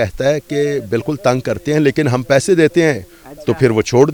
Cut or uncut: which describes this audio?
uncut